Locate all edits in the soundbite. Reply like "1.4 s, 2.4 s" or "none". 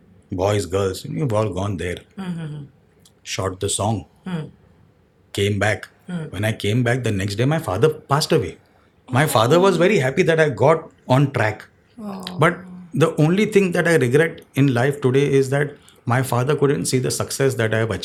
none